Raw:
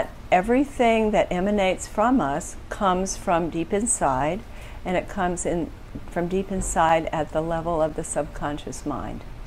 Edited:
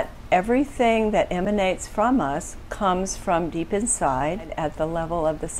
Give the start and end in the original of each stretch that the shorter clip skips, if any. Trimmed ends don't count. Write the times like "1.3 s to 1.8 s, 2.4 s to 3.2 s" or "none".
4.5 s to 7.1 s